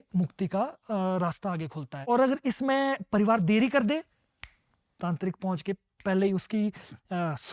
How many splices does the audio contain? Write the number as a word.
one